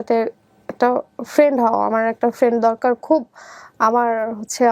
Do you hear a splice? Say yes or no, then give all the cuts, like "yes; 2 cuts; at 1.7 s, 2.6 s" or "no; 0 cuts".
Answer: no; 0 cuts